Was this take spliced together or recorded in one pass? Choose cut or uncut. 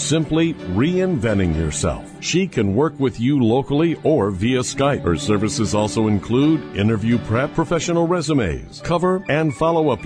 uncut